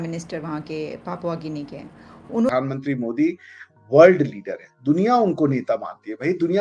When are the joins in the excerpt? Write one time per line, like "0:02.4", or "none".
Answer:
0:02.5